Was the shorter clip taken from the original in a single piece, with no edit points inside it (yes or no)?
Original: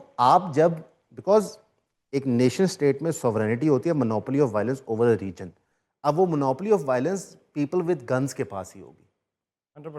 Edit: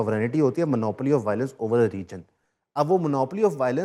yes